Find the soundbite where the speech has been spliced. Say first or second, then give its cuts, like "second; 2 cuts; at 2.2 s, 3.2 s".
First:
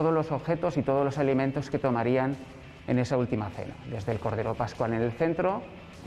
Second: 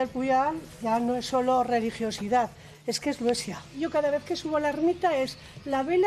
second; 1 cut; at 3.7 s